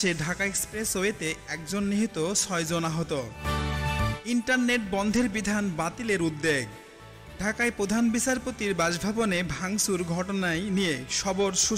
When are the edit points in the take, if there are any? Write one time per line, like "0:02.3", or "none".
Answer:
none

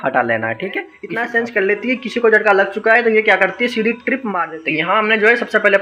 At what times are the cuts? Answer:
0:01.0
0:04.5

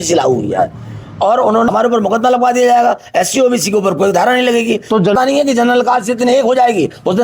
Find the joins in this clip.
0:01.7
0:05.1

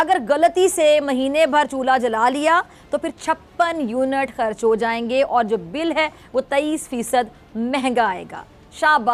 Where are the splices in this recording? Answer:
none

